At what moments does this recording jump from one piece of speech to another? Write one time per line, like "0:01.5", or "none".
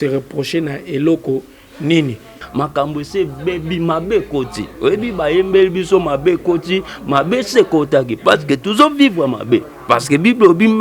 0:02.3